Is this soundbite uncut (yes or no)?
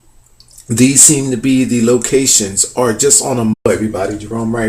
yes